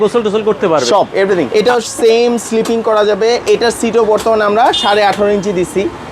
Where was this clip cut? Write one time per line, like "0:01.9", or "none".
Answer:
0:01.5